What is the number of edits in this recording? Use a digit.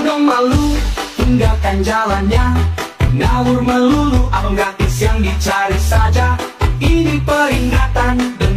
0